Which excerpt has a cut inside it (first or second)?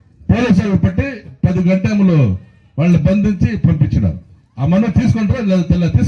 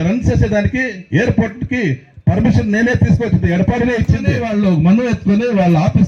second